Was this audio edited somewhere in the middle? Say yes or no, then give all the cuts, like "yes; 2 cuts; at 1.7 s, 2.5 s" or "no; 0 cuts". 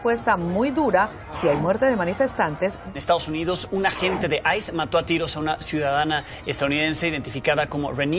yes; 1 cut; at 2.9 s